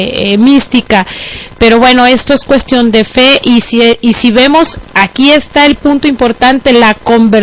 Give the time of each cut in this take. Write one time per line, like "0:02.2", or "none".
0:06.0